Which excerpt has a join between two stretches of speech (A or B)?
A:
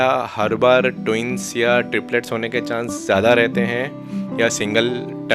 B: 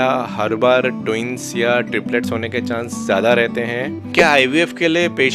B